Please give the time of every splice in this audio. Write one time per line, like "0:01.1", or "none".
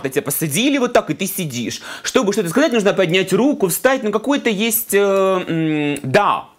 none